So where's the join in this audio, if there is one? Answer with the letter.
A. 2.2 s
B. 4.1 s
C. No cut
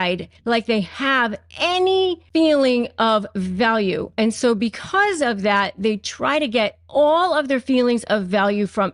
A